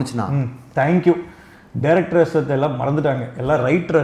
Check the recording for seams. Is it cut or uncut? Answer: uncut